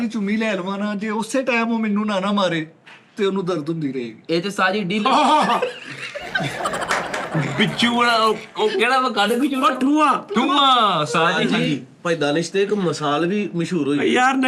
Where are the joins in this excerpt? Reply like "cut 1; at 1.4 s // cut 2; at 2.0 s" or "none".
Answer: none